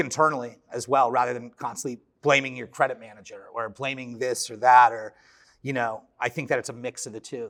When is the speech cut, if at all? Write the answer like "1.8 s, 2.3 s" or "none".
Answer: none

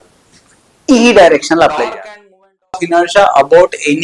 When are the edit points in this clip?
2.7 s

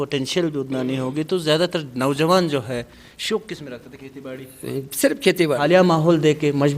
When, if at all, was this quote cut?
5.6 s

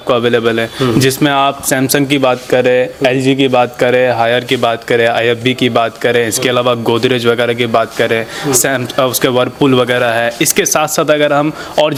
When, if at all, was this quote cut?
none

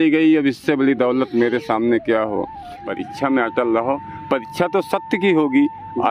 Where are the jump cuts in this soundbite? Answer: 2.9 s

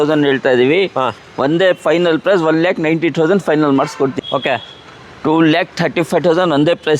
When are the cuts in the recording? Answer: 4.2 s

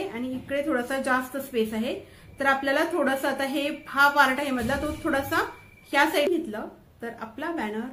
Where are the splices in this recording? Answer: 6.3 s

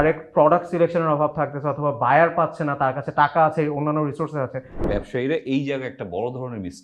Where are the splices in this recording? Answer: 4.9 s

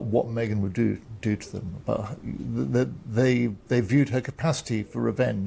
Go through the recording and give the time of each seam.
none

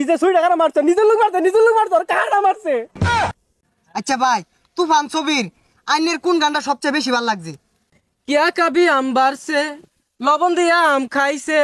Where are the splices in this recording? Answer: 3.3 s, 7.8 s

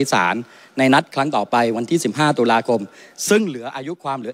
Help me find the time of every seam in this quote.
none

